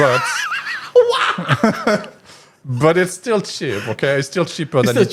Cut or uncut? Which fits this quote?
uncut